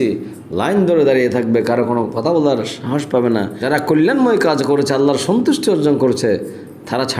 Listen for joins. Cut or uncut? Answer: cut